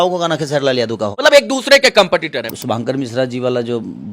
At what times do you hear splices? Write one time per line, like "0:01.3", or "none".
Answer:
0:01.1
0:02.5